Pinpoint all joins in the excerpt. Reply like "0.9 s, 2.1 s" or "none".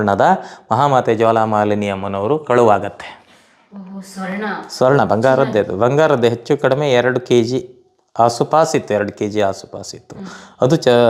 none